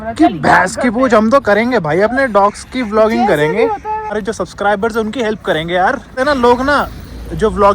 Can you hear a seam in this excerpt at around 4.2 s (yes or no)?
yes